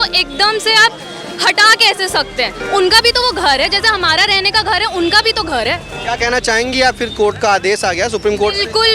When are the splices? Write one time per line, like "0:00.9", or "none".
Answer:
0:02.6
0:05.9

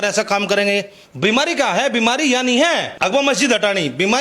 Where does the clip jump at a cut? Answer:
0:01.0
0:02.9

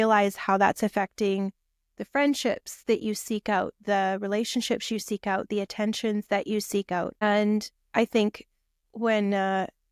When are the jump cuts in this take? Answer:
0:07.2

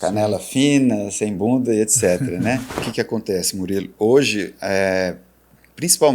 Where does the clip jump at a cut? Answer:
0:02.8

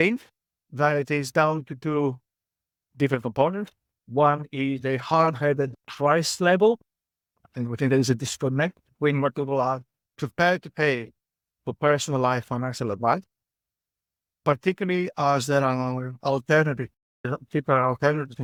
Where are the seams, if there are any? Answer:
none

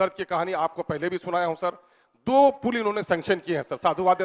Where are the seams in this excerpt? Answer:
none

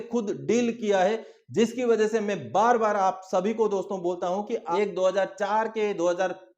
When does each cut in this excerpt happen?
0:04.7

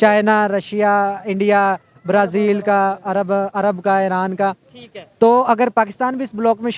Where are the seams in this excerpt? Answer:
none

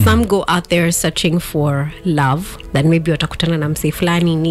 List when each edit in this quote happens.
none

